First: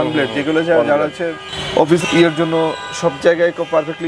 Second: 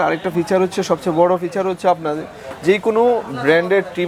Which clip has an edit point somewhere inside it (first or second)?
first